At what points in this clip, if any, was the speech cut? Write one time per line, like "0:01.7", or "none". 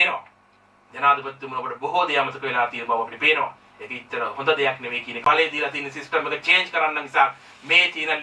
0:05.2